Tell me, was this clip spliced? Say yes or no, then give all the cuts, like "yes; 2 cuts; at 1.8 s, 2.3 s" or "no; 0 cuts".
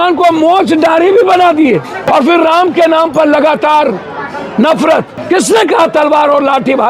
yes; 2 cuts; at 2.1 s, 5.1 s